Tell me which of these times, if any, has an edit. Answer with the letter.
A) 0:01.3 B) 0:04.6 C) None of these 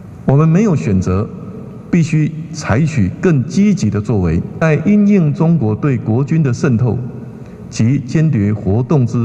B